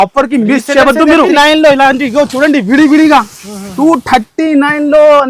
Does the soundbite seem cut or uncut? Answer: cut